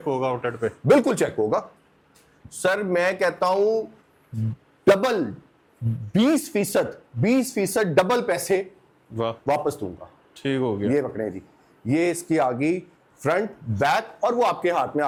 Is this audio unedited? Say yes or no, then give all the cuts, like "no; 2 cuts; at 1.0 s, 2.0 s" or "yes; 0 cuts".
yes; 0 cuts